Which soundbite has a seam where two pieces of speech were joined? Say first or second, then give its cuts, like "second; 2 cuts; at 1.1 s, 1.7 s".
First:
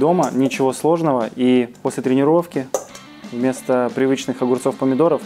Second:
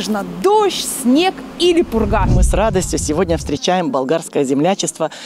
second; 1 cut; at 2.3 s